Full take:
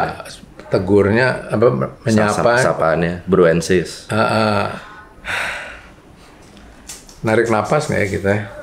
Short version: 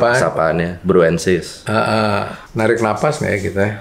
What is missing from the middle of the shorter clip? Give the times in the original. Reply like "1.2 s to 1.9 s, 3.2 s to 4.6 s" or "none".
4.8 s to 7.1 s

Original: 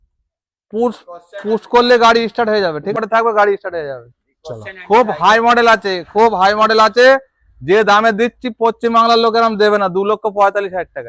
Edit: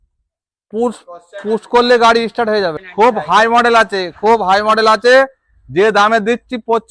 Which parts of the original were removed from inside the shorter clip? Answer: 2.8 s to 4.7 s

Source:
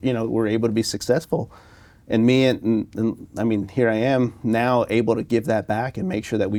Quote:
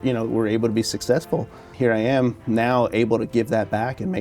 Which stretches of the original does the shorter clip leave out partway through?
1.7 s to 3.7 s

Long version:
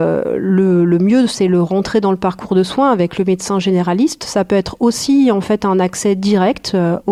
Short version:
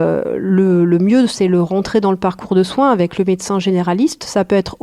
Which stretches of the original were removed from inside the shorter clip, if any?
none

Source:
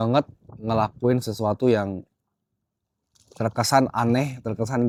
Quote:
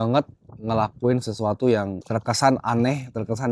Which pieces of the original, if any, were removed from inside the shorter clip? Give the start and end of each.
2.0 s to 3.3 s

